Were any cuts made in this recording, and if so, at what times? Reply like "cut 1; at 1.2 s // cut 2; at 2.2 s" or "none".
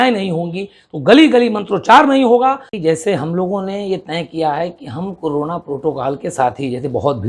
cut 1; at 2.7 s